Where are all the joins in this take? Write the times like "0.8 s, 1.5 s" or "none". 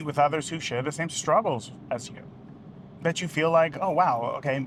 none

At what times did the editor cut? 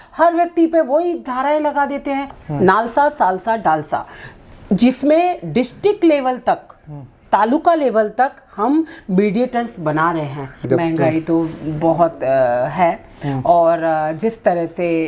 2.4 s, 10.7 s

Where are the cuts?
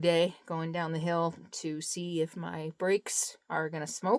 none

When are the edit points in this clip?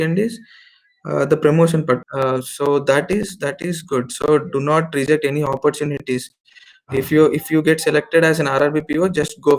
2.0 s

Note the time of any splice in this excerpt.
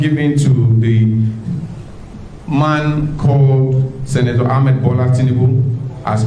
none

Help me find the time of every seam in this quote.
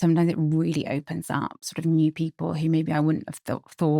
1.7 s

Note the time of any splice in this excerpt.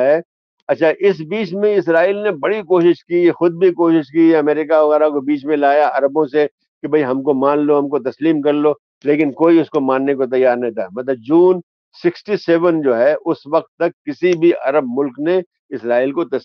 none

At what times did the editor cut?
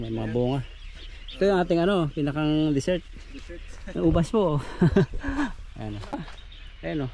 6.1 s

